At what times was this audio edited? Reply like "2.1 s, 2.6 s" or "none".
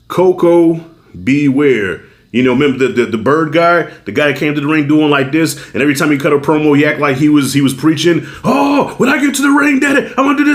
none